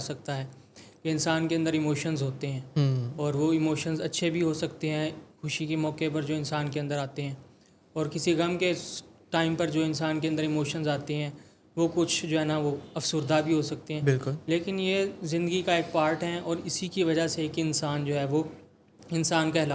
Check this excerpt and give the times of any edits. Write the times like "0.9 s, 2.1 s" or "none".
none